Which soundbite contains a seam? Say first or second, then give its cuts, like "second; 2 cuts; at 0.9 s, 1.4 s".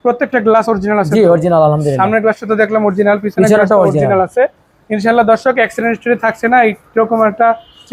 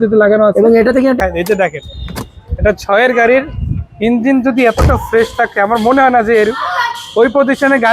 second; 1 cut; at 1.2 s